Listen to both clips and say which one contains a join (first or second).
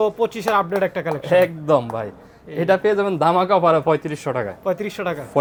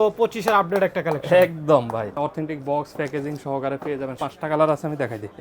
second